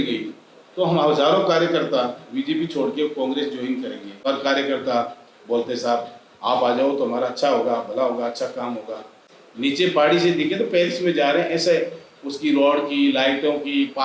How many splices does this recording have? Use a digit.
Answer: 2